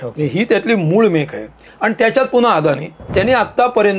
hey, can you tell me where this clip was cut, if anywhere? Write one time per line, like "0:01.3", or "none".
0:02.9